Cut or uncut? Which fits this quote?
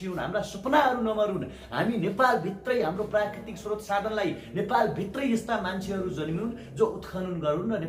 uncut